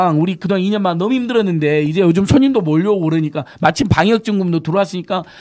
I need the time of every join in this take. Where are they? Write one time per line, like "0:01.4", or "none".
none